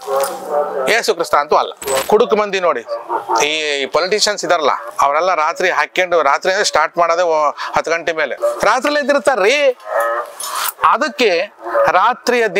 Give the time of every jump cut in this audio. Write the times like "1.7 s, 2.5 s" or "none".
2.0 s, 4.9 s, 8.3 s